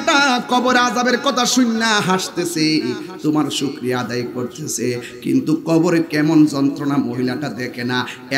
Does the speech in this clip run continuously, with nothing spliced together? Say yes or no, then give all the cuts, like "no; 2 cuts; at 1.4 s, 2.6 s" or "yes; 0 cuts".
yes; 0 cuts